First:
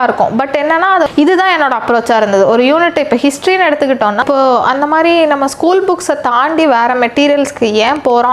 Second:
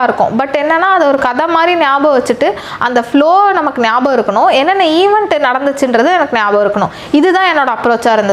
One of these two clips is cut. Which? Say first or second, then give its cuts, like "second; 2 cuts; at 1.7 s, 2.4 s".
first; 2 cuts; at 1.1 s, 4.2 s